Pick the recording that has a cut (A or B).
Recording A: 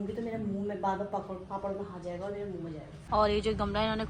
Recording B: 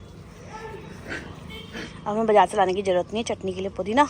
A